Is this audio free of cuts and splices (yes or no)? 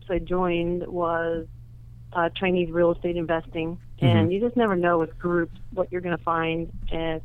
yes